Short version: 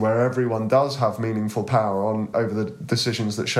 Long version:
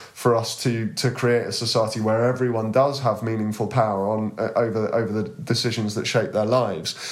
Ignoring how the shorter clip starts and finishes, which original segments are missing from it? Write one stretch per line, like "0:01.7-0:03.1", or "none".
0:04.4-0:04.9